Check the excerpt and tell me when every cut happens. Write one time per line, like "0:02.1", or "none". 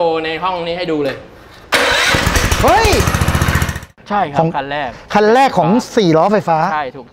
0:03.8